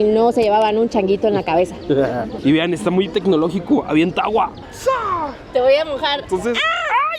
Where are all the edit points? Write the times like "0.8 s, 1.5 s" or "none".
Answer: none